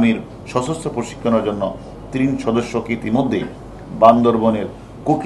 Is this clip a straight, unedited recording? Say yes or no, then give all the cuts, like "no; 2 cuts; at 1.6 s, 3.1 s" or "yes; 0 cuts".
yes; 0 cuts